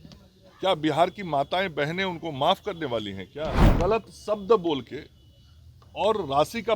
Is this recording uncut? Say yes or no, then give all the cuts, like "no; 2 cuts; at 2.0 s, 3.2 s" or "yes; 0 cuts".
no; 1 cut; at 3.6 s